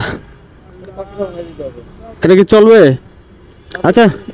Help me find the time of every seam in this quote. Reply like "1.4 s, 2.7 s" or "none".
none